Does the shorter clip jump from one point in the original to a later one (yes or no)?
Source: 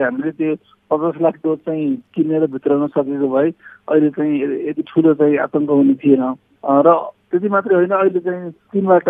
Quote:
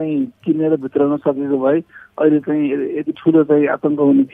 no